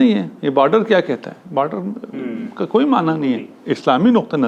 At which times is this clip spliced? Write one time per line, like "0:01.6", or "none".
none